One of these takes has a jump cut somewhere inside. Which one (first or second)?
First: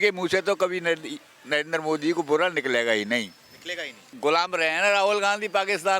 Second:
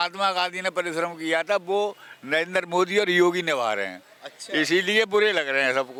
first